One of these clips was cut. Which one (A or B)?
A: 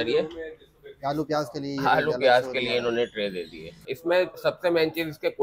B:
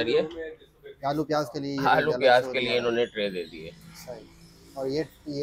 A